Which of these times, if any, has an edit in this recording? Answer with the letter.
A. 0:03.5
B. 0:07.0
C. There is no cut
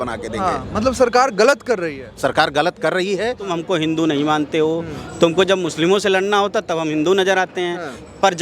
A